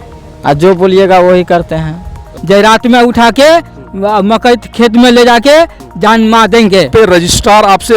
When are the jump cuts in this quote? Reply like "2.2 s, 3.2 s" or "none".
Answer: 2.3 s, 6.9 s